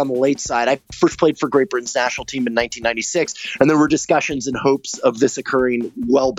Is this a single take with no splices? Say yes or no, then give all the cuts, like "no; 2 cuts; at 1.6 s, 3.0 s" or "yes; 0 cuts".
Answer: yes; 0 cuts